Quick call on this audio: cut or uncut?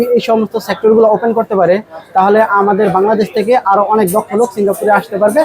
uncut